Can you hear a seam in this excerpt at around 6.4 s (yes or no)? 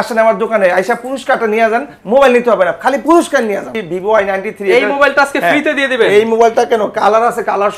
no